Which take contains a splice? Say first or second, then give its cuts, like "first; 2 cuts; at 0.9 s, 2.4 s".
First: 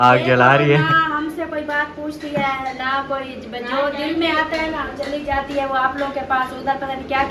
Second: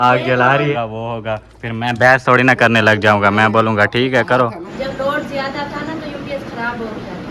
second; 2 cuts; at 0.7 s, 4.7 s